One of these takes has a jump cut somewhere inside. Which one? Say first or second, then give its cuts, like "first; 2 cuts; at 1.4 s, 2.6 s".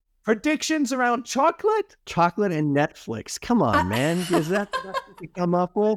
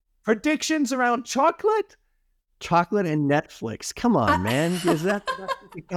first; 1 cut; at 2.0 s